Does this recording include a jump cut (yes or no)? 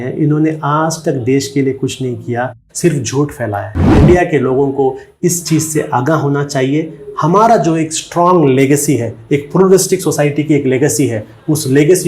yes